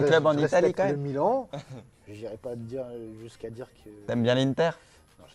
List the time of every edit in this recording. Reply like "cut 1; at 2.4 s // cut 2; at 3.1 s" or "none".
cut 1; at 3.3 s